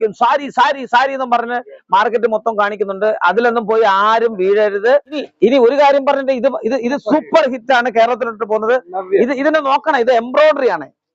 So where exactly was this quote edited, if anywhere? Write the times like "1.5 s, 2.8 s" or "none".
5.3 s